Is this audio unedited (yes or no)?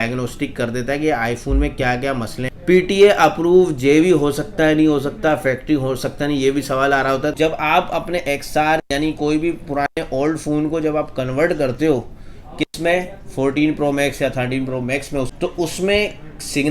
no